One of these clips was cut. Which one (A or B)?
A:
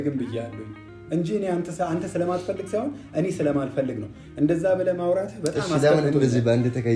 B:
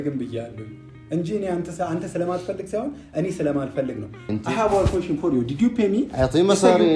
B